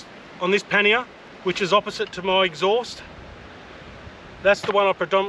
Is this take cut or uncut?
uncut